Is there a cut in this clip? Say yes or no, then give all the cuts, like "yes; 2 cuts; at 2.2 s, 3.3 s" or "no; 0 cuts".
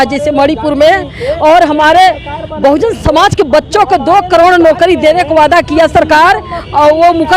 no; 0 cuts